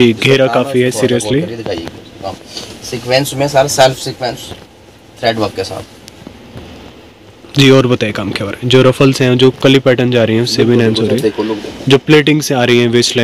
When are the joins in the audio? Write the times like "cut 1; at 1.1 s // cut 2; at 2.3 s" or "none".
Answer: none